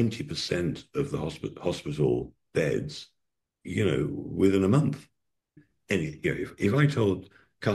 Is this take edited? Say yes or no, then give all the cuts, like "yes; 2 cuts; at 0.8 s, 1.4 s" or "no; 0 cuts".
yes; 1 cut; at 5.5 s